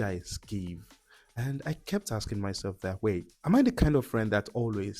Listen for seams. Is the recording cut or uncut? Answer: cut